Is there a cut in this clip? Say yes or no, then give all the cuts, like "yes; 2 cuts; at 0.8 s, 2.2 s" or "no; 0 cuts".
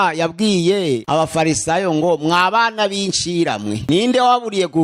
yes; 2 cuts; at 1.0 s, 3.8 s